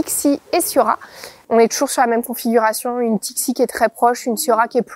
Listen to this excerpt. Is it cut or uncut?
uncut